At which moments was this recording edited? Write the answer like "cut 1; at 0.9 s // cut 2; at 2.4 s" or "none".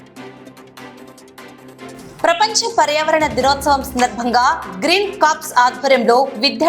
cut 1; at 1.6 s